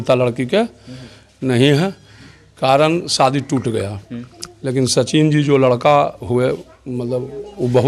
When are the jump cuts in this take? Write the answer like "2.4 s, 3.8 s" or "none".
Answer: none